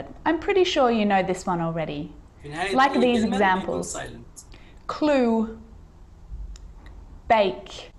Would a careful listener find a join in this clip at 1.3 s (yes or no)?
yes